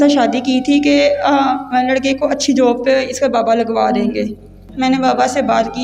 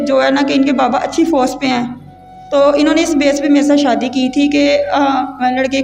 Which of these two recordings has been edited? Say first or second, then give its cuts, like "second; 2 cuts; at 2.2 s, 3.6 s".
first; 1 cut; at 4.6 s